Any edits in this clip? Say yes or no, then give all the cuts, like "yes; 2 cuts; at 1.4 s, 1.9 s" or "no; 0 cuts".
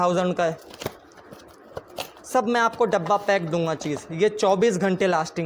no; 0 cuts